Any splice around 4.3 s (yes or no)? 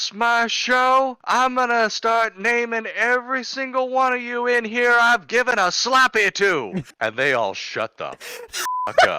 no